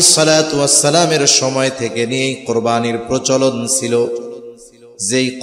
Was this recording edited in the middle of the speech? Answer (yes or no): no